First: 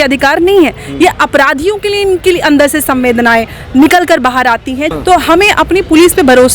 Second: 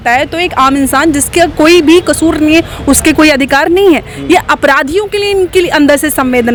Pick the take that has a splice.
first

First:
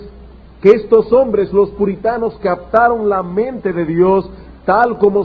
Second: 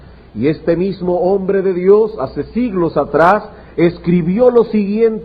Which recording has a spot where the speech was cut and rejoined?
first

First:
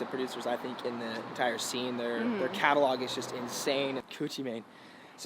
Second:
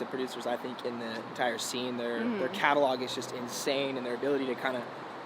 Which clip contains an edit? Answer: first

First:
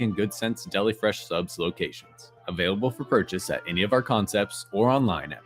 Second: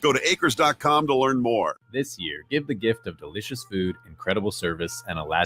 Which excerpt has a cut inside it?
second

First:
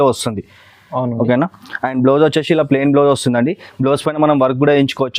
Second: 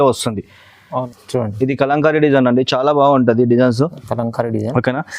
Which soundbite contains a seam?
second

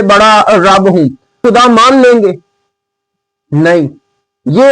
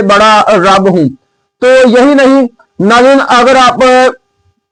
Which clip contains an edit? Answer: first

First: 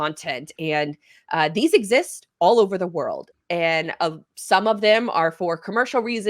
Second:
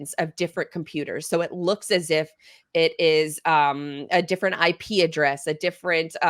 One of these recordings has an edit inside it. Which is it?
first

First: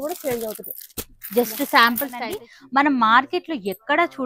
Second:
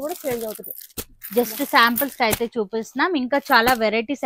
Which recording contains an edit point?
first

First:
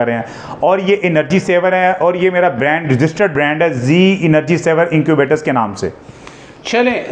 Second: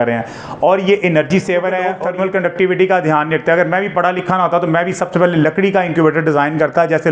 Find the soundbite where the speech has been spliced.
second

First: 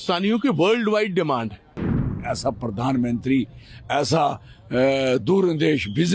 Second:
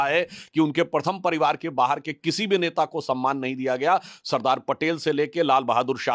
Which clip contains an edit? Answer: first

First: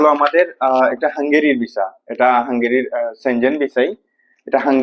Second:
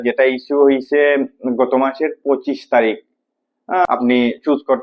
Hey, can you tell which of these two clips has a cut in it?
second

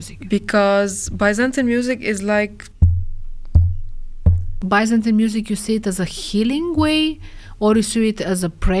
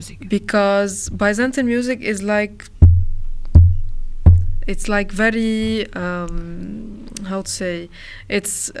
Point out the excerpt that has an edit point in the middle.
first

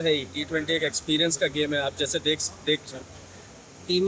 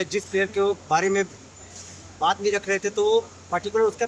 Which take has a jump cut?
first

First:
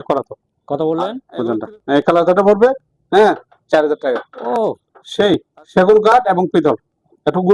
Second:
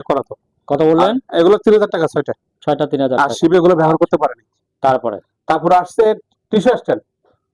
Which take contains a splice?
first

